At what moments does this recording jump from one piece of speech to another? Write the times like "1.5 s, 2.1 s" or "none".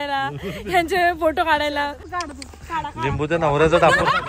2.1 s